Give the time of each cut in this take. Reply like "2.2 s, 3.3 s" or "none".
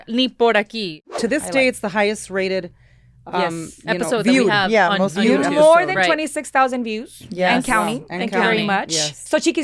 1.2 s